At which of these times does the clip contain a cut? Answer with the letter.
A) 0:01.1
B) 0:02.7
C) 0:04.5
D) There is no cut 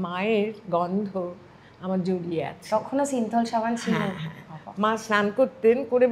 D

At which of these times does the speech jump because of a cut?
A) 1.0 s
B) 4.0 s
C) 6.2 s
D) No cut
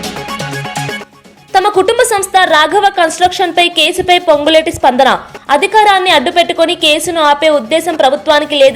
A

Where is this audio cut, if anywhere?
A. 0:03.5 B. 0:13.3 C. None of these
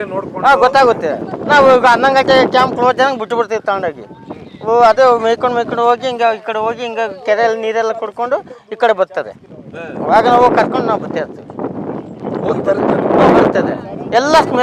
C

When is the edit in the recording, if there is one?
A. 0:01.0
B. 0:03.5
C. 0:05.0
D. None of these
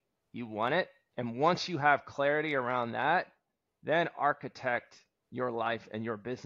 A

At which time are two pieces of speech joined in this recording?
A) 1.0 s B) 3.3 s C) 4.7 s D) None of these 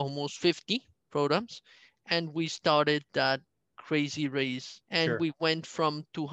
C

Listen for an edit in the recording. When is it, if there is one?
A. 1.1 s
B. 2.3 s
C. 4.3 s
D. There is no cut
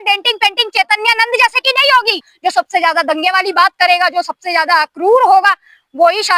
B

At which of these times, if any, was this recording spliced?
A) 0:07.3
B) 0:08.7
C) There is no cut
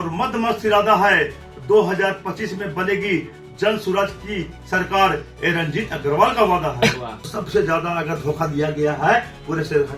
A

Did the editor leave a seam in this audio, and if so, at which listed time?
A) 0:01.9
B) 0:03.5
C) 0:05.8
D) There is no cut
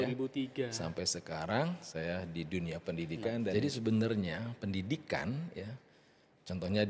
B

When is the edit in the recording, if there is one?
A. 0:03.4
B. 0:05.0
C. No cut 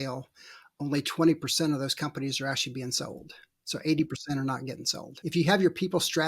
B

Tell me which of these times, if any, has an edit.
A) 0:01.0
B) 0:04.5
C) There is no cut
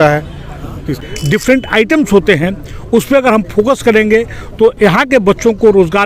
A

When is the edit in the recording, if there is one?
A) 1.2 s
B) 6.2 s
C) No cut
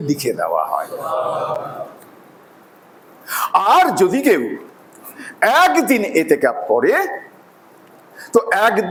C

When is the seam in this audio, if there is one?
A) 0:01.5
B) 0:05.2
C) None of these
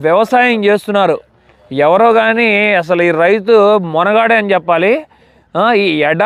C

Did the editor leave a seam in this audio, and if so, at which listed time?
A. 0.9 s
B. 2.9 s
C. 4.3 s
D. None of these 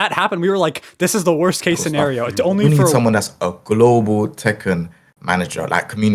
B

